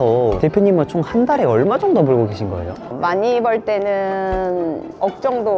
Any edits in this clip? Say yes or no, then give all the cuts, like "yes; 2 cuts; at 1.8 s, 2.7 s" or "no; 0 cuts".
no; 0 cuts